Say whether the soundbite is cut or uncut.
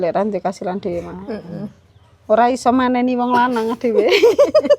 uncut